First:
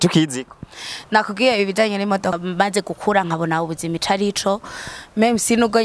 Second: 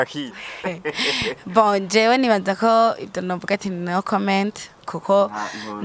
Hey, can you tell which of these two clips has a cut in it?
first; 1 cut; at 2.4 s

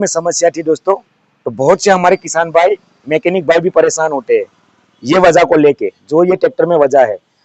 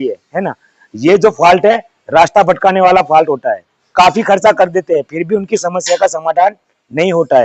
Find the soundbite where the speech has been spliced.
second; 1 cut; at 3.7 s

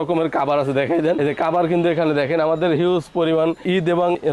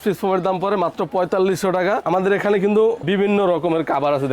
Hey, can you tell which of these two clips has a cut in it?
second; 1 cut; at 2.0 s

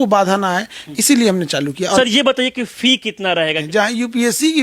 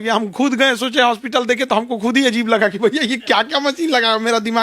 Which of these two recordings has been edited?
first; 2 cuts; at 2.0 s, 3.6 s

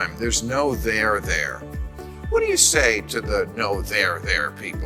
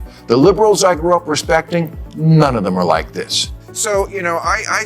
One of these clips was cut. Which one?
second; 1 cut; at 3.5 s

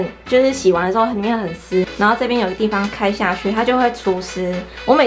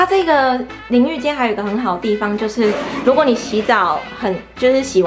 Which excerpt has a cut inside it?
first; 1 cut; at 1.9 s

